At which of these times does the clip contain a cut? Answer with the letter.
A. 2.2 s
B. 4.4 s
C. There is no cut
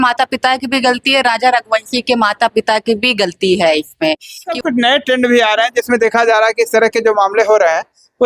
B